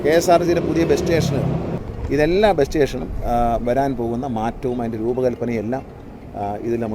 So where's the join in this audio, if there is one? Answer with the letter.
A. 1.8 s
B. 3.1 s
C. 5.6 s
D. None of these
A